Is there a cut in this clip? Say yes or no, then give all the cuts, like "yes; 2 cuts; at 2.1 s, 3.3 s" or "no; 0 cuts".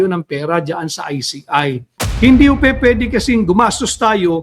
yes; 1 cut; at 2.0 s